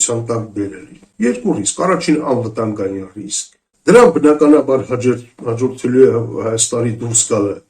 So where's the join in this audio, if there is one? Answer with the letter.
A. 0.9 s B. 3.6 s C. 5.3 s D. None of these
B